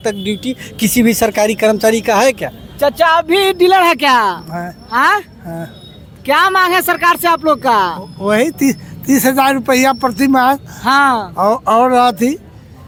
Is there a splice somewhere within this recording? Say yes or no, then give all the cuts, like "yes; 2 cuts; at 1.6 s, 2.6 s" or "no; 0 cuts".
no; 0 cuts